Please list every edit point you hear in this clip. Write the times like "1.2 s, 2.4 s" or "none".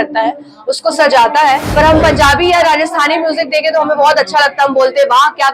1.7 s